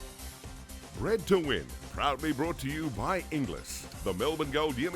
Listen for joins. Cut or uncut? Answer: cut